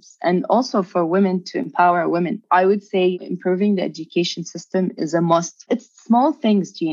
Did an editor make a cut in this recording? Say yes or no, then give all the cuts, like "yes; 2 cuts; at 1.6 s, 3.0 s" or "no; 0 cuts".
yes; 3 cuts; at 2.4 s, 3.2 s, 5.7 s